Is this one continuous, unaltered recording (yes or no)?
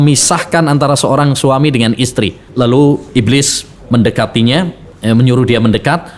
no